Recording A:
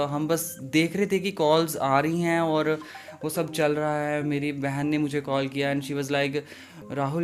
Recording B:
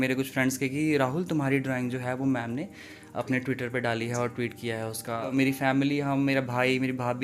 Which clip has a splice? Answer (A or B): B